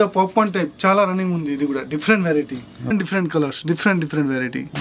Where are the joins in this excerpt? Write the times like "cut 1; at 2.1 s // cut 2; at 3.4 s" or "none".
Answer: cut 1; at 2.9 s